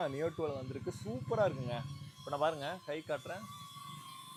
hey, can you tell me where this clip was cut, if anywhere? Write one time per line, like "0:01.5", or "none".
none